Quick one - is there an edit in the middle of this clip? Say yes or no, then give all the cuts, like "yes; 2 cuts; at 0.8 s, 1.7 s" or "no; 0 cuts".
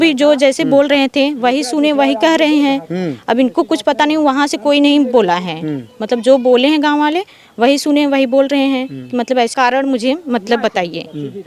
yes; 1 cut; at 9.5 s